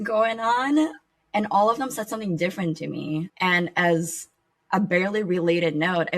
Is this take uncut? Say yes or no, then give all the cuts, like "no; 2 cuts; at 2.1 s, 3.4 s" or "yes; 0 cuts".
no; 2 cuts; at 1.0 s, 3.3 s